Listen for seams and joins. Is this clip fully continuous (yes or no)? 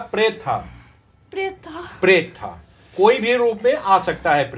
yes